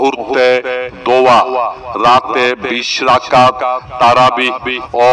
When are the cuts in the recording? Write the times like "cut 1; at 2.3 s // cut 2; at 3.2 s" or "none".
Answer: none